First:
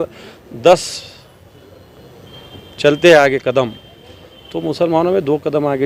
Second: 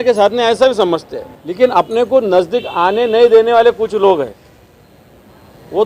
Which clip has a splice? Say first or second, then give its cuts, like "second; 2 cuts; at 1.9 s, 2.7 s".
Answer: second; 1 cut; at 1.4 s